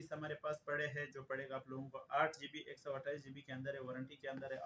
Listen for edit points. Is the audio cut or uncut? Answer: uncut